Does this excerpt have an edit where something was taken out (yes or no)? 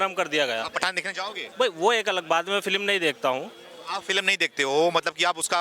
yes